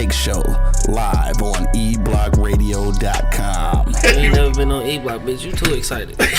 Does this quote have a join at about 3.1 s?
no; 0 cuts

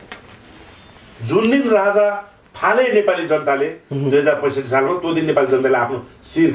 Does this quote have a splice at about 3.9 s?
no; 0 cuts

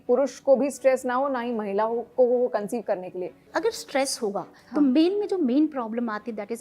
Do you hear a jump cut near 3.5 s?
yes; 1 cut; at 3.5 s

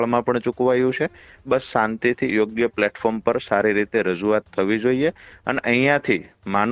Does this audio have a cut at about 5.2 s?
no; 0 cuts

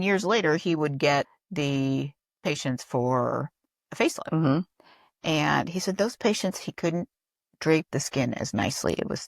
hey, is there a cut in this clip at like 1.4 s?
yes; 1 cut; at 1.4 s

